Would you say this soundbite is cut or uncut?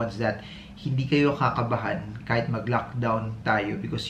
uncut